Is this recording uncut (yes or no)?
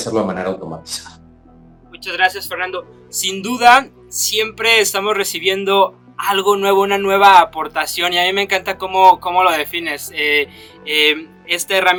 yes